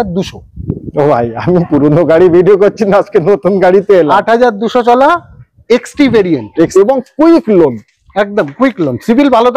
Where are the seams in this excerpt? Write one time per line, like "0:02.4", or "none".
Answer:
0:06.7